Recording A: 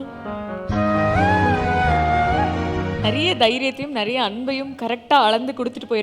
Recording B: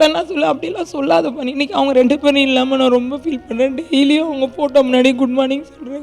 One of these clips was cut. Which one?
A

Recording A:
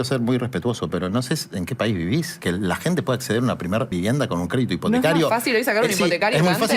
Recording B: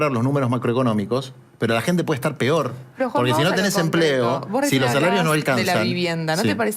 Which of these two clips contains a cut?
A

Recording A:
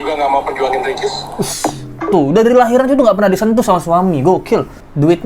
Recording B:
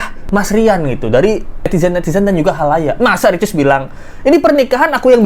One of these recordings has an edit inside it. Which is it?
A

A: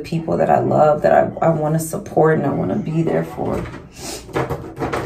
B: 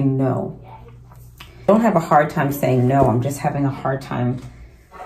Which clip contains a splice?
B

